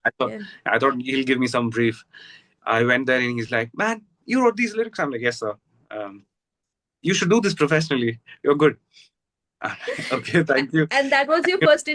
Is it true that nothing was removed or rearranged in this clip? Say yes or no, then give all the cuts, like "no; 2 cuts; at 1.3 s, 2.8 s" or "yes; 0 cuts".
yes; 0 cuts